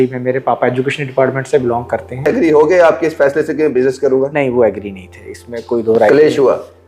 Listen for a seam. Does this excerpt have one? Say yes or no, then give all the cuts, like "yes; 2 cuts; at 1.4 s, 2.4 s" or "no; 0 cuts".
yes; 1 cut; at 2.3 s